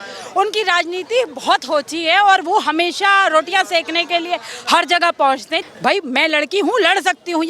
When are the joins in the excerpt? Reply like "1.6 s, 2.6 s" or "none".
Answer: 5.5 s